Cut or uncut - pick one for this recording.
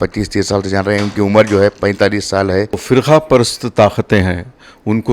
cut